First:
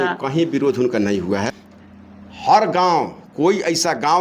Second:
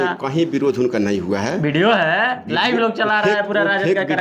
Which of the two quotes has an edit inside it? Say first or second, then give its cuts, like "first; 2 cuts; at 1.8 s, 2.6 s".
first; 1 cut; at 1.5 s